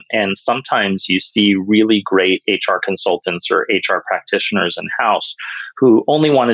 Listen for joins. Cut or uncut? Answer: uncut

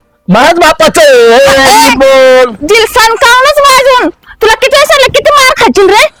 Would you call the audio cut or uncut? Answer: uncut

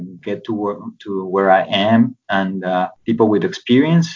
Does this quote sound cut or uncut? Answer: cut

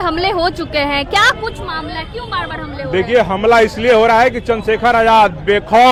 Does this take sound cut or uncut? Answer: uncut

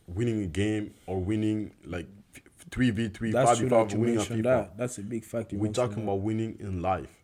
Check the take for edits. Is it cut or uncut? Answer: uncut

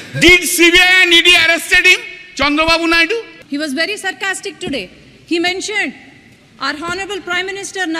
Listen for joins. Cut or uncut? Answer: cut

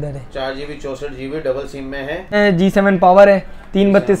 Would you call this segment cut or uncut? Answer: cut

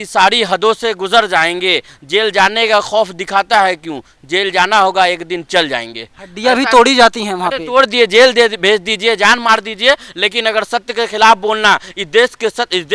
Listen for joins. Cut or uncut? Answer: uncut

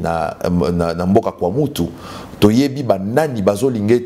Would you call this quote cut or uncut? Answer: uncut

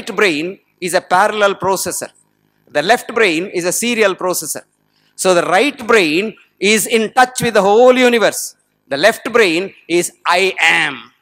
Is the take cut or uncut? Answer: uncut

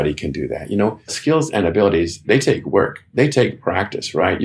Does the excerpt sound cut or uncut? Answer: cut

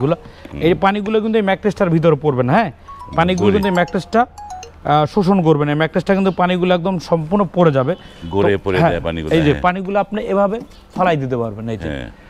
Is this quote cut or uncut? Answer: uncut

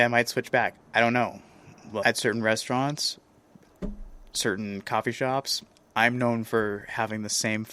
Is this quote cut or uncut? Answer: uncut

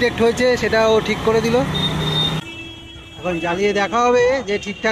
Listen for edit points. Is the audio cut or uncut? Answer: cut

